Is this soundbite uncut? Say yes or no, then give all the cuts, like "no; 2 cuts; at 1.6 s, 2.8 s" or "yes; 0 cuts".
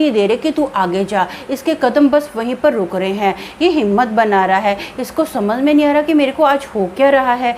yes; 0 cuts